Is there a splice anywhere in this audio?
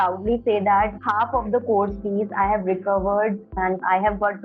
yes; 2 cuts; at 1.0 s, 3.6 s

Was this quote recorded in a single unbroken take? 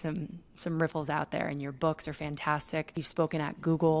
no; 1 cut; at 3.0 s

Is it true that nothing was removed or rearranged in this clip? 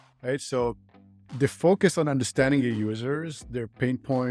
yes; 0 cuts

